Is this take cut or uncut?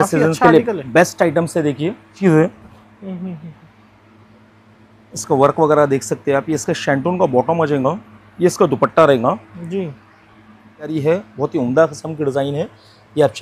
cut